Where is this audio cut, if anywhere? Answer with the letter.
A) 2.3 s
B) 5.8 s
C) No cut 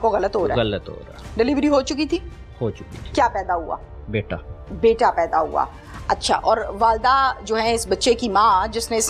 C